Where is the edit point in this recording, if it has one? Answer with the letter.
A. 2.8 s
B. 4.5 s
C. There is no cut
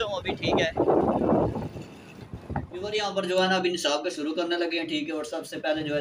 A